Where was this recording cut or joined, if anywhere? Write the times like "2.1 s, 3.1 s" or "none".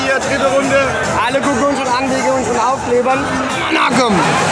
3.6 s